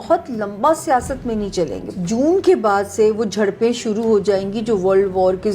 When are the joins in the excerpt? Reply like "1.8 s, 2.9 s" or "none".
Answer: 1.9 s